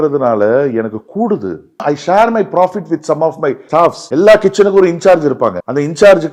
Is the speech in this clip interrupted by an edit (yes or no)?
no